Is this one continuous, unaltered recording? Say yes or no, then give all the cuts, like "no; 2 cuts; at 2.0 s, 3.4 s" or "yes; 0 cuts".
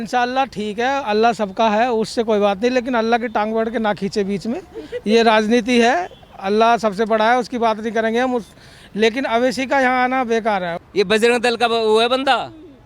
no; 1 cut; at 10.7 s